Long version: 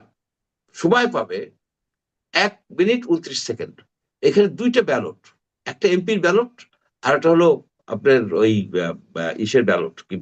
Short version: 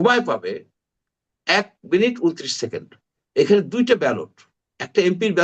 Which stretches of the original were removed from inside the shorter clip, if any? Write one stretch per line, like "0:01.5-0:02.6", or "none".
none